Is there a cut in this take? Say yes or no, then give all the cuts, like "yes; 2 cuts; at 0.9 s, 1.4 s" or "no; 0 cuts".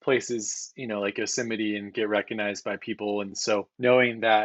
yes; 1 cut; at 3.3 s